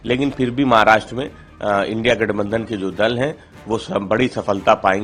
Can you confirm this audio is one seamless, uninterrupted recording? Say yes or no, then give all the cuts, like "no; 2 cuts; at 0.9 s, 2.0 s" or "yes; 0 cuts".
yes; 0 cuts